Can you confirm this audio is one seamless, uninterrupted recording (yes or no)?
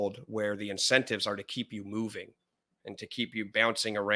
yes